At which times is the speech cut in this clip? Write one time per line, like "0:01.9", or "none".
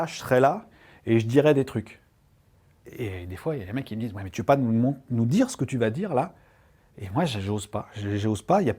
0:02.8